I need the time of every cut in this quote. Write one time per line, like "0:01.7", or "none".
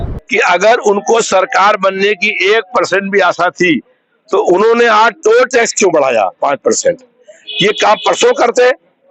none